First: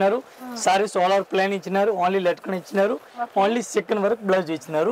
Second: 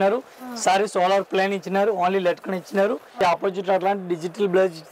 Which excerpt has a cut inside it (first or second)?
second